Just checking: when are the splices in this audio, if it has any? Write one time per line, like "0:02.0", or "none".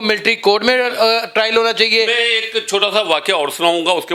none